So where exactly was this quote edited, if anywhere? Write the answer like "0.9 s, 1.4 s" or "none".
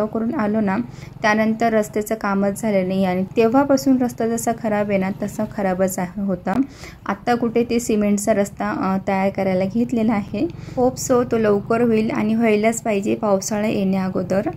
none

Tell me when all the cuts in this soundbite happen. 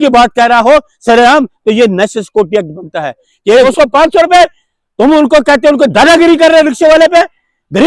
3.5 s

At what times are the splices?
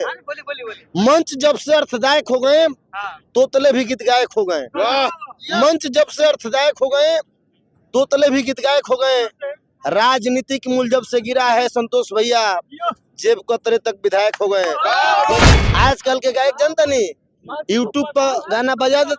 15.5 s

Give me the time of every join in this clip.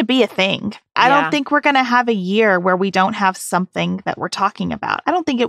0.9 s

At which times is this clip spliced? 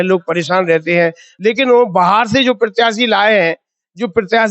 1.3 s

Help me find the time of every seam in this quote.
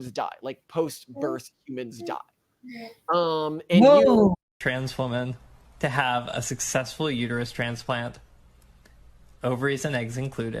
4.5 s

